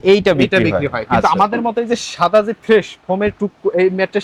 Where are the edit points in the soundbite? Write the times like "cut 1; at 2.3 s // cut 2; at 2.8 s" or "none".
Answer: none

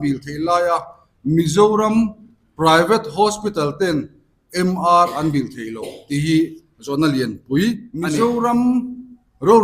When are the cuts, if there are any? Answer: cut 1; at 8.1 s

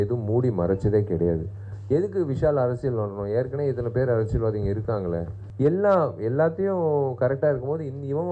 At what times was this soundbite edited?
cut 1; at 5.4 s

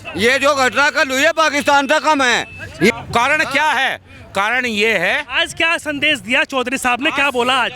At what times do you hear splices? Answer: cut 1; at 2.9 s

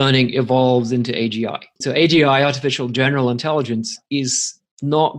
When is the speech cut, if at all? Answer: cut 1; at 1.8 s

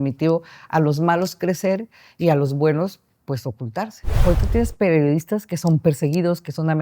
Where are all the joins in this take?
cut 1; at 4.0 s

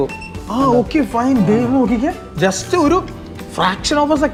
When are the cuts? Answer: none

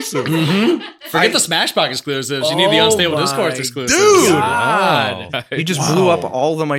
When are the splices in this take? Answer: cut 1; at 5.2 s

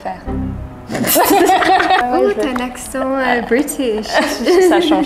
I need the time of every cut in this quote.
cut 1; at 2.0 s

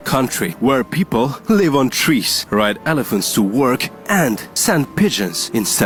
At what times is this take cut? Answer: none

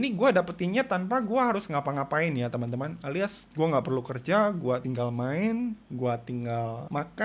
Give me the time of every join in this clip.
none

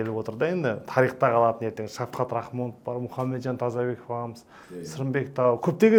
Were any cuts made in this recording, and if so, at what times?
none

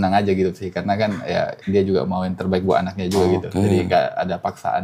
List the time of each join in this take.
none

